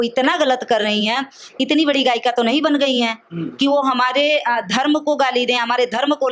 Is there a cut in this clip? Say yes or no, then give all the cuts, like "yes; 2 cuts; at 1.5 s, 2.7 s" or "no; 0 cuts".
no; 0 cuts